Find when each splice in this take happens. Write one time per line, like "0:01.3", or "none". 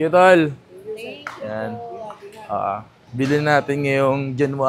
none

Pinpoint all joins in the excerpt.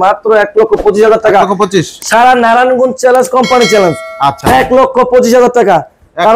none

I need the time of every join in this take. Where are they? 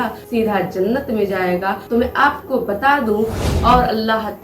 0:03.5

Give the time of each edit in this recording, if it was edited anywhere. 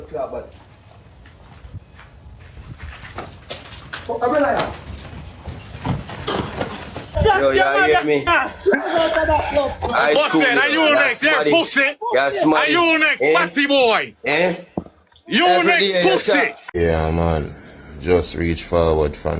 0:07.1
0:16.6

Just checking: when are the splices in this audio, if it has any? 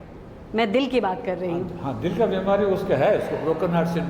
none

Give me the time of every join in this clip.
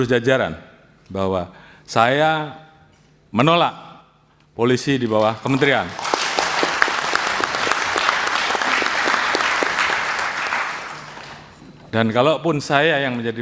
none

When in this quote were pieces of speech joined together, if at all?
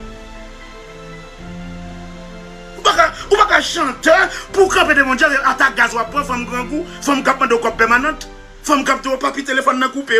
none

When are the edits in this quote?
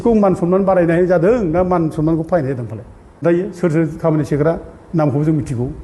0:03.2

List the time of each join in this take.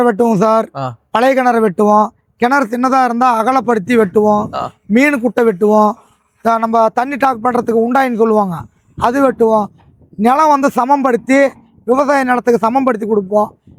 none

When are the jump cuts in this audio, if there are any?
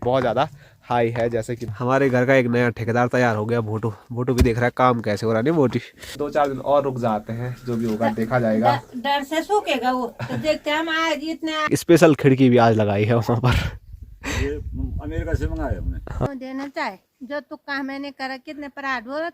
0:01.6
0:06.2
0:11.7
0:16.3

